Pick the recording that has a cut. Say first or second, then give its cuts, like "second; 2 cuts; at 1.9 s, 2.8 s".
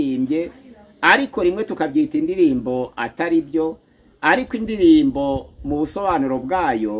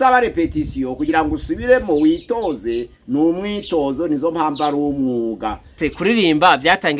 second; 1 cut; at 5.8 s